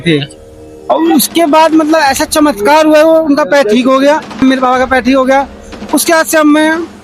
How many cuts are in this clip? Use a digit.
1